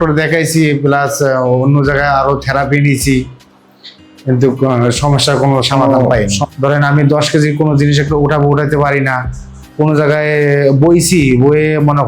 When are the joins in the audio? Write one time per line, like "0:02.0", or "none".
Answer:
0:06.4